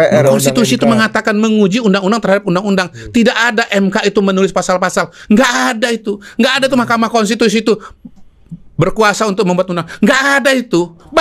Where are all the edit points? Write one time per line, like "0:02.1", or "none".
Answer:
none